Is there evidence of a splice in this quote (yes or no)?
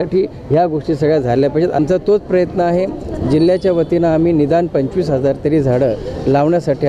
yes